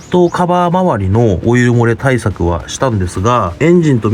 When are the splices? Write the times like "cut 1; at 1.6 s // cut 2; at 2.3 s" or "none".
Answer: none